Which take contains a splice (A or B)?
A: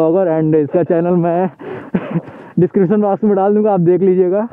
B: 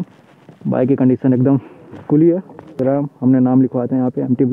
B